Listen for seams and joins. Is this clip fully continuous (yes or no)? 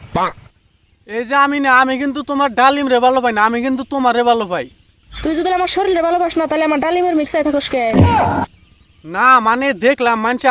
yes